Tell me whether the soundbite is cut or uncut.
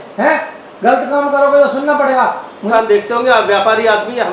cut